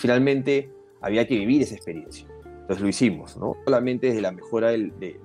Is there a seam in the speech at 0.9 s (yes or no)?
no